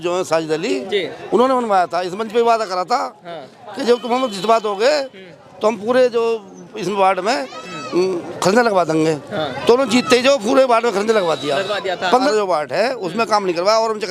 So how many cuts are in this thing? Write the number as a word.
one